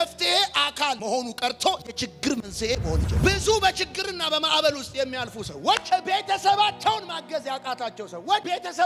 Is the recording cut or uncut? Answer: cut